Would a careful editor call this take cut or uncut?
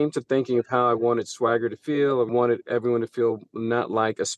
cut